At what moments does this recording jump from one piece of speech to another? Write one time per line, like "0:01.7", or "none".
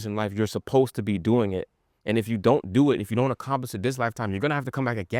none